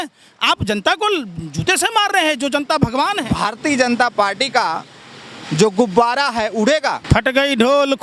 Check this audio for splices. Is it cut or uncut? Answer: cut